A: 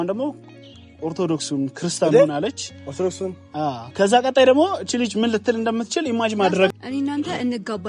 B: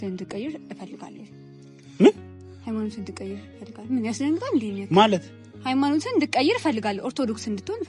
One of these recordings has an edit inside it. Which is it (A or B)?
A